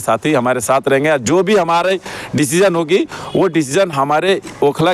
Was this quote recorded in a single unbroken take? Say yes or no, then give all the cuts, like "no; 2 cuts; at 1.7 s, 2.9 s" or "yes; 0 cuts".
yes; 0 cuts